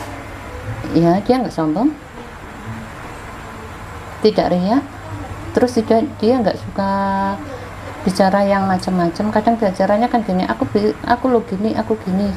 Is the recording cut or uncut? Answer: uncut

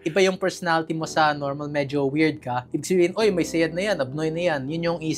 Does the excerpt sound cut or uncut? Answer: uncut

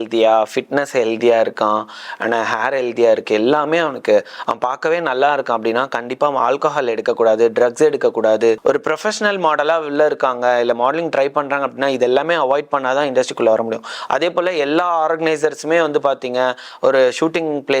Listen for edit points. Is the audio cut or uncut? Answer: cut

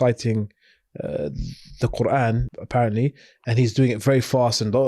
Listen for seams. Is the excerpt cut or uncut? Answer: cut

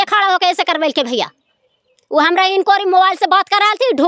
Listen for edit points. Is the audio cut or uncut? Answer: uncut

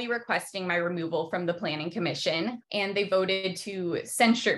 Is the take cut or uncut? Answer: cut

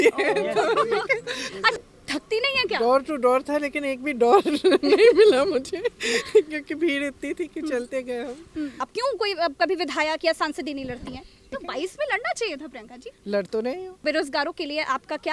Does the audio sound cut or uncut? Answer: cut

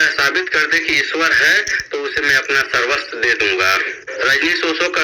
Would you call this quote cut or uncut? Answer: cut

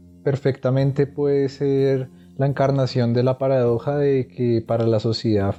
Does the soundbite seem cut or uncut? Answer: uncut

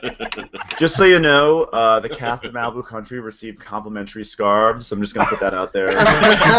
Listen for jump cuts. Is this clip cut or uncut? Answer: uncut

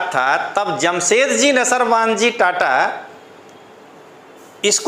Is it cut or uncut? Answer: uncut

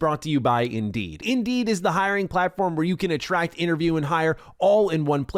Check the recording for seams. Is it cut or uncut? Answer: cut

